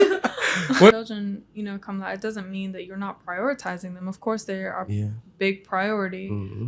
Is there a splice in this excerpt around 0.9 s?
yes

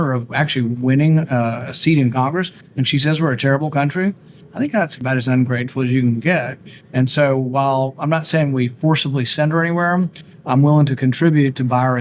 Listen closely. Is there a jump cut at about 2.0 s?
yes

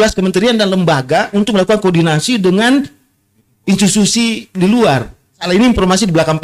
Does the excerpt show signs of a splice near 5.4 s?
yes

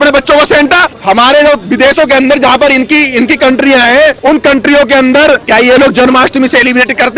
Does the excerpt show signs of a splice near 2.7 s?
no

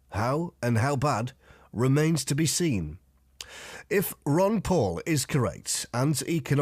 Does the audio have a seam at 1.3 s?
yes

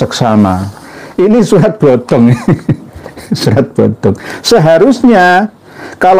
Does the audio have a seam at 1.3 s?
yes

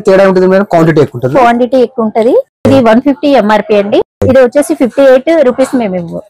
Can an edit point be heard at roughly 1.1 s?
no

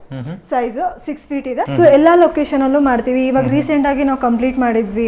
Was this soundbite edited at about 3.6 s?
no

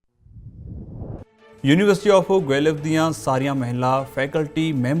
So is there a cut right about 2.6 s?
no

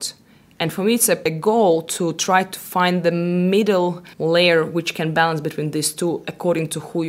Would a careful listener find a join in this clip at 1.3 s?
yes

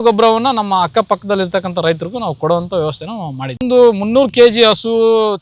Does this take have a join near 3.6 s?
yes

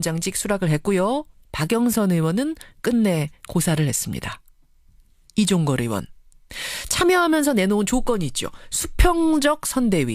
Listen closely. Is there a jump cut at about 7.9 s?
yes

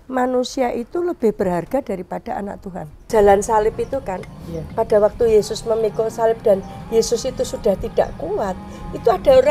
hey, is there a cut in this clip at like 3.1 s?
yes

